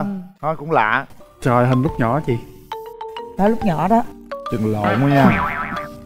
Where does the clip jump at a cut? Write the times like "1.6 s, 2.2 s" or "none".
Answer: 1.1 s